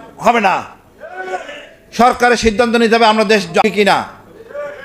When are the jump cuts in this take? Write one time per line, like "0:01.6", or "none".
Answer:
0:03.6